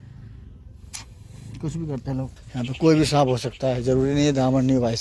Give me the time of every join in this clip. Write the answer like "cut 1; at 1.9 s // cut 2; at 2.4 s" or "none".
cut 1; at 2.4 s